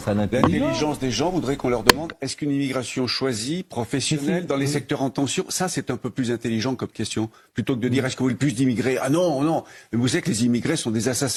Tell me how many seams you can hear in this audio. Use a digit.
0